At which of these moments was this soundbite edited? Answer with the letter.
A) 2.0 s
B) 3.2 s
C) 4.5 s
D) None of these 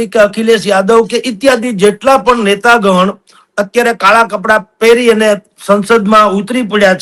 D